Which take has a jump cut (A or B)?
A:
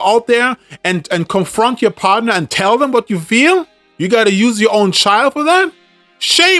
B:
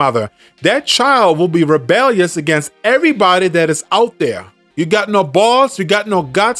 B